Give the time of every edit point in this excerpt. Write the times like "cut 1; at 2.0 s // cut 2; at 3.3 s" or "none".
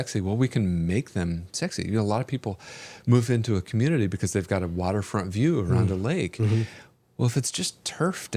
none